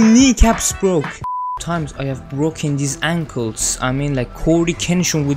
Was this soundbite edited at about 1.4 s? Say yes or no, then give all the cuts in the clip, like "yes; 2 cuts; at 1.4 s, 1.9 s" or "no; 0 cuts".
yes; 1 cut; at 1.4 s